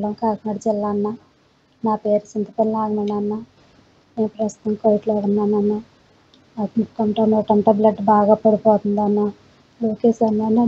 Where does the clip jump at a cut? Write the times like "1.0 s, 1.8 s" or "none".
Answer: none